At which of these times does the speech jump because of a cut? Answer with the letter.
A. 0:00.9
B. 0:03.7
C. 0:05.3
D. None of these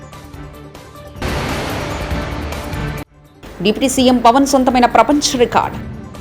A